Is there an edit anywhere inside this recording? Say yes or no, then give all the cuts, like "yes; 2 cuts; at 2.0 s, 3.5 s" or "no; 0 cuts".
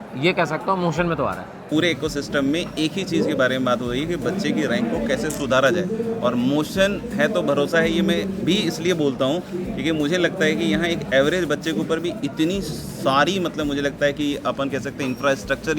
yes; 1 cut; at 1.6 s